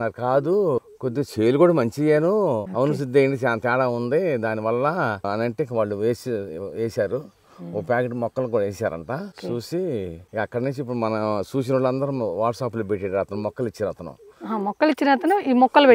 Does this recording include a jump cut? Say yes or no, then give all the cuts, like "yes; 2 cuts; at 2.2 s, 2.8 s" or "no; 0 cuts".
no; 0 cuts